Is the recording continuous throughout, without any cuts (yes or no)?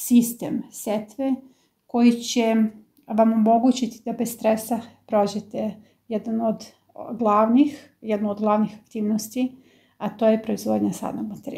yes